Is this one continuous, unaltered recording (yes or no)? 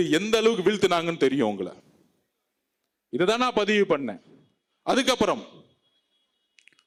yes